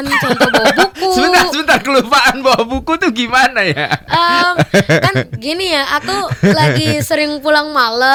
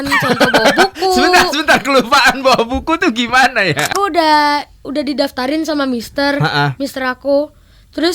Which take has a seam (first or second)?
second